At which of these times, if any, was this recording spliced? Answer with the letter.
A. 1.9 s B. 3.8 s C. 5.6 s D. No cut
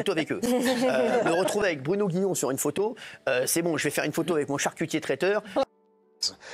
C